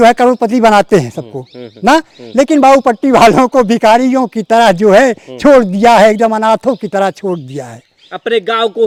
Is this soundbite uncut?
yes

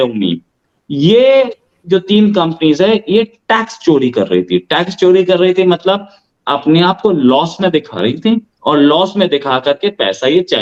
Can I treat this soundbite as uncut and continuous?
yes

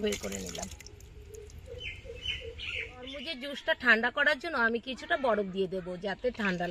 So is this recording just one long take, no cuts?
no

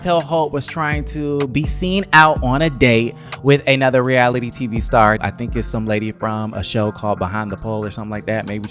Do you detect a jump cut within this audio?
no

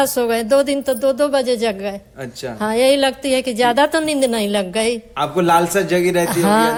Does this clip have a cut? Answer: no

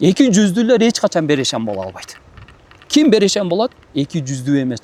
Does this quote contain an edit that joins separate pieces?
no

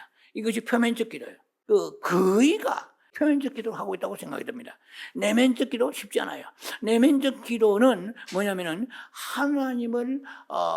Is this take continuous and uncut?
no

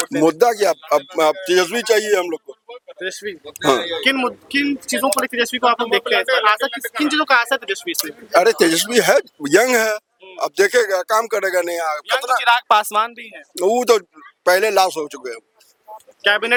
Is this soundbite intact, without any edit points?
yes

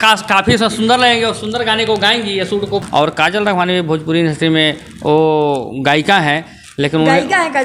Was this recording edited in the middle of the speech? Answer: yes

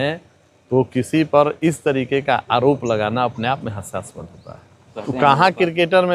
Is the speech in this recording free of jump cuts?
no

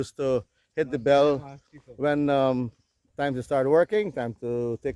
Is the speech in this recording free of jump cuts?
yes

